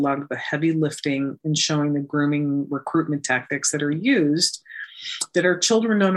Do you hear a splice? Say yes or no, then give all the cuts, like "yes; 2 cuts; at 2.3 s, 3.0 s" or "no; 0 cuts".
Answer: no; 0 cuts